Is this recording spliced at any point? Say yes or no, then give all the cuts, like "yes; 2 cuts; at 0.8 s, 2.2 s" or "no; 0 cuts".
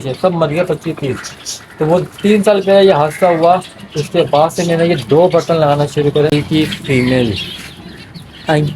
yes; 1 cut; at 6.3 s